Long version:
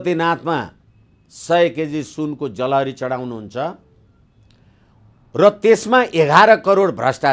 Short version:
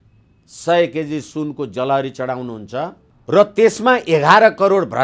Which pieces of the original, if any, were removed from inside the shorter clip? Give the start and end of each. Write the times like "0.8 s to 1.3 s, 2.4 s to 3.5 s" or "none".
3.9 s to 5.1 s